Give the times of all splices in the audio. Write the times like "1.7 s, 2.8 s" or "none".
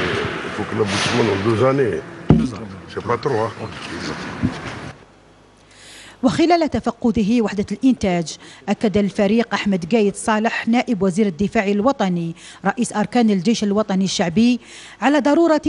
8.7 s